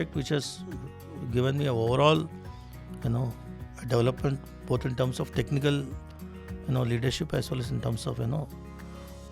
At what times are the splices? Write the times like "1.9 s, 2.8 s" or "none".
none